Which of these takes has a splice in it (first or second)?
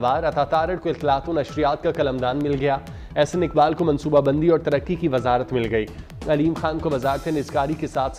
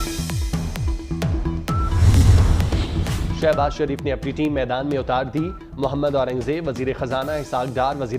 second